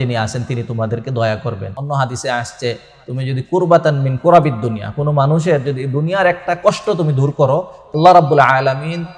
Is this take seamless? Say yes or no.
no